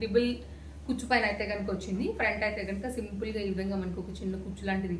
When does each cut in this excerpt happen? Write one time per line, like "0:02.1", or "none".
none